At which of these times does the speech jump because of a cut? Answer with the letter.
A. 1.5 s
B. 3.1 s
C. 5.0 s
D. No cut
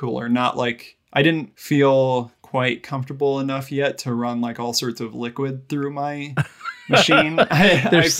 A